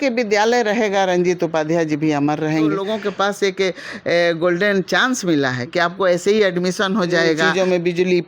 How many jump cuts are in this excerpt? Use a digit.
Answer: 2